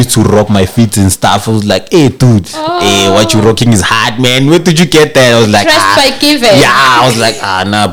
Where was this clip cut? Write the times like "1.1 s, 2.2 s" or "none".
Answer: none